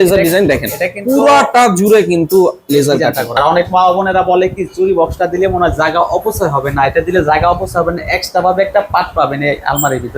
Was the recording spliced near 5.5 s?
no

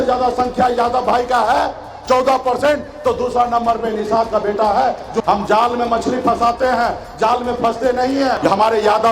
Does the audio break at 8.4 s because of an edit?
yes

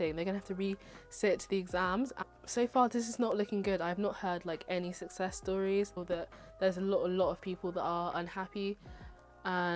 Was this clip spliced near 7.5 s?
no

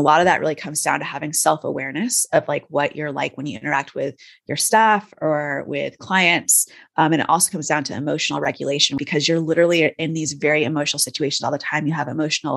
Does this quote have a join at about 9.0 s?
yes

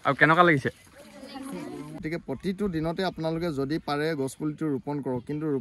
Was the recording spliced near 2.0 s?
yes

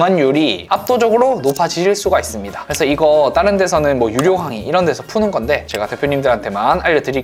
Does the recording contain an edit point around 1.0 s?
no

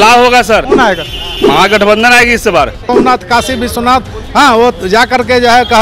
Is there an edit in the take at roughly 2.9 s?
yes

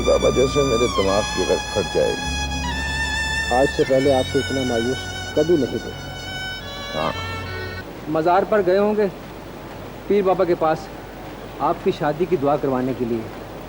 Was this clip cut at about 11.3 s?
no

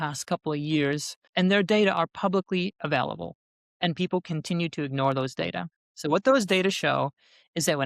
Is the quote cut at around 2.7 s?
no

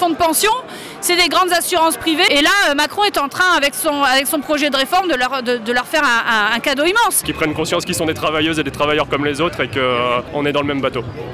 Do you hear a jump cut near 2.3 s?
yes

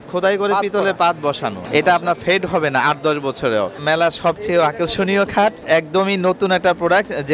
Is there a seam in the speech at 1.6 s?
yes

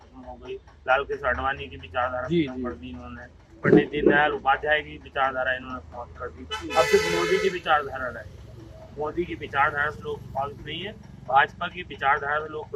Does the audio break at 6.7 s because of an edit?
no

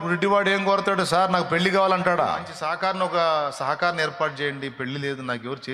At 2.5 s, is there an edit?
yes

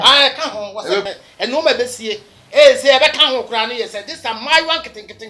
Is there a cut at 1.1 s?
yes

